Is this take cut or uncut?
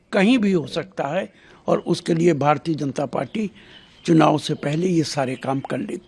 uncut